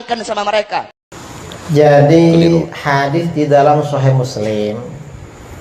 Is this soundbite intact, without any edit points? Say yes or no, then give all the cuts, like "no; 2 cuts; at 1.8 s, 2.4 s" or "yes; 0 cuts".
no; 1 cut; at 1.0 s